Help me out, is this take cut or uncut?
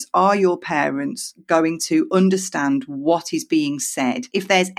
uncut